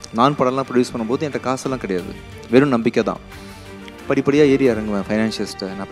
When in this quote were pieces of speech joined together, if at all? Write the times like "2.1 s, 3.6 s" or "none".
none